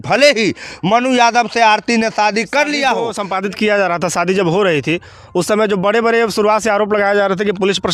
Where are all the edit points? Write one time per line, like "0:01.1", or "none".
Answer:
0:03.2